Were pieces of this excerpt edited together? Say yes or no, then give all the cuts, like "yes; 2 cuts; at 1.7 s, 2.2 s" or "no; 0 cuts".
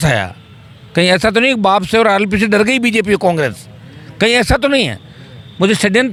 no; 0 cuts